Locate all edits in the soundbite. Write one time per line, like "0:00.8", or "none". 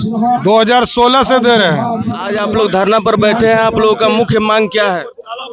0:02.4